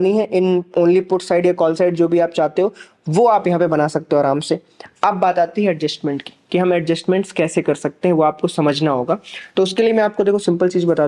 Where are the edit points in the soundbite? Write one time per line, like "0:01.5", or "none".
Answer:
none